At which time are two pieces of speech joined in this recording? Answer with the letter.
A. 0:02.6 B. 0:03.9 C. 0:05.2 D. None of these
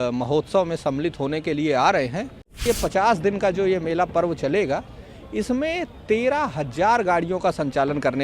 A